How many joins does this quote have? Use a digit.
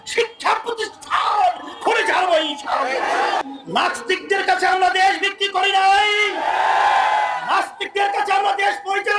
1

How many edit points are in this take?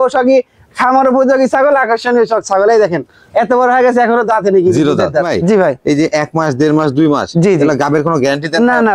1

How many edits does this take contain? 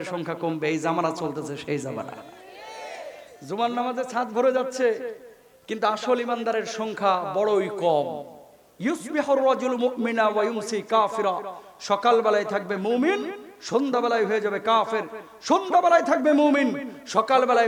0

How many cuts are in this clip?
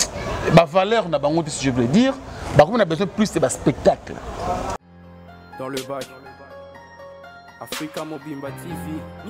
1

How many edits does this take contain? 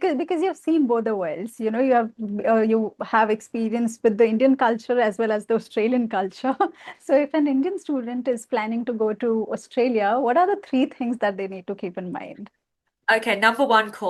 0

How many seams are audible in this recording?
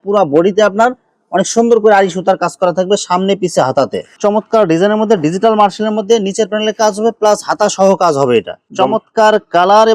2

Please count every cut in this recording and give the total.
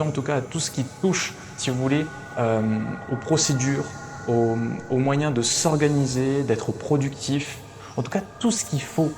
1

